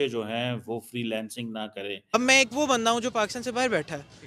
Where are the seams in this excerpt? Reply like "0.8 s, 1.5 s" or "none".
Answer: 2.0 s